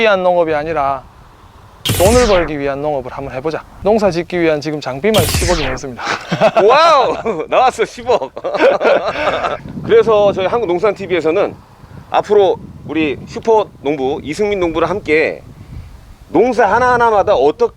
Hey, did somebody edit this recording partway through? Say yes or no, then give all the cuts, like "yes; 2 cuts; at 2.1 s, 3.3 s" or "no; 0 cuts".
yes; 2 cuts; at 3.7 s, 9.7 s